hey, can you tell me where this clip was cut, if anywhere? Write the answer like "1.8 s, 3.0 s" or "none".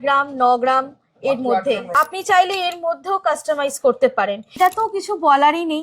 1.9 s, 4.6 s